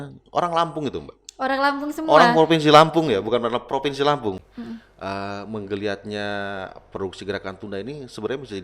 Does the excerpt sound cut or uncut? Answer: cut